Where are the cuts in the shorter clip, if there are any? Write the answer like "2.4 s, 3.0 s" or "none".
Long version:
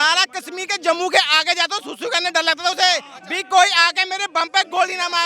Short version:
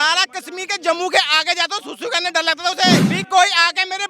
3.1 s